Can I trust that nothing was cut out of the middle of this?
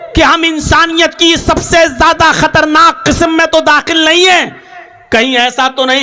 yes; 0 cuts

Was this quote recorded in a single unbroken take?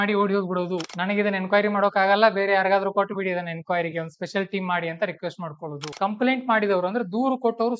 no; 2 cuts; at 0.9 s, 5.9 s

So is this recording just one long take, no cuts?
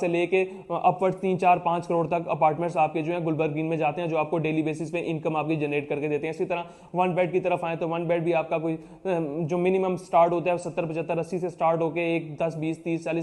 yes; 0 cuts

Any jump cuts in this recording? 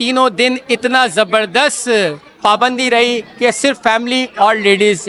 no; 0 cuts

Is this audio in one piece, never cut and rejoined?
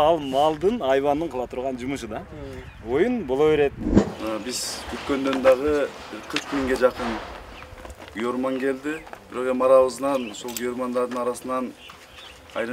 no; 1 cut; at 3.9 s

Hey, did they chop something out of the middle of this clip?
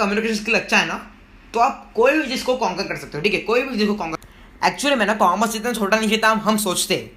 yes; 1 cut; at 4.3 s

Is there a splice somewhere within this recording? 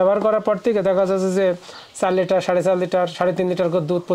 no; 0 cuts

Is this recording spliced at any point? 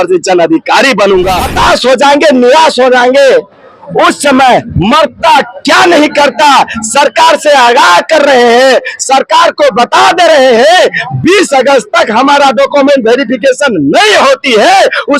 yes; 1 cut; at 1.5 s

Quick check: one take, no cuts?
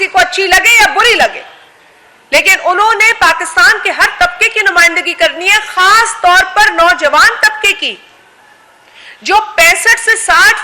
yes; 0 cuts

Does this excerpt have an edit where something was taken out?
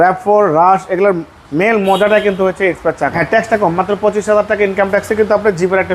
yes; 1 cut; at 3.2 s

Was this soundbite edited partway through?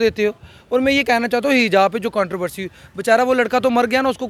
no; 0 cuts

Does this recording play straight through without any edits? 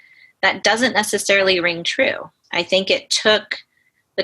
no; 1 cut; at 2.4 s

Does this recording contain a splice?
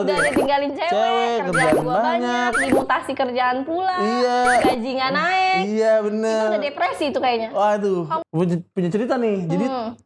yes; 1 cut; at 8.2 s

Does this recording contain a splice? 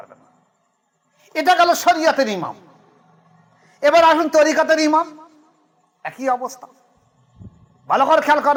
no; 0 cuts

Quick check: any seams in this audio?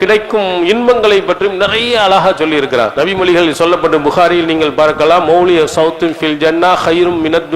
no; 0 cuts

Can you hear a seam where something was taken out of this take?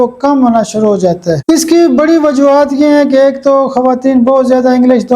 yes; 1 cut; at 1.4 s

